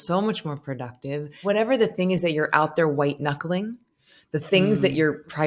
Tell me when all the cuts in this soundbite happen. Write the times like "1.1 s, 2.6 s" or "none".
1.4 s